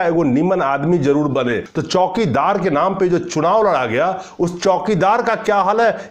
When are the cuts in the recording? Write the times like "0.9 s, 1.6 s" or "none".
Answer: 1.7 s